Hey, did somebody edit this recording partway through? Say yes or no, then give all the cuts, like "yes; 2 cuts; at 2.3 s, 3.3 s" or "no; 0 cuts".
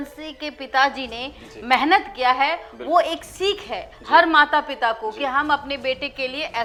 no; 0 cuts